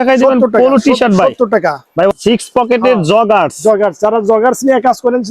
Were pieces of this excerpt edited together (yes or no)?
yes